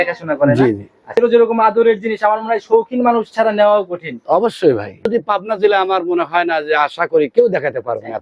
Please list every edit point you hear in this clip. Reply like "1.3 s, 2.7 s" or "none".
1.2 s, 5.1 s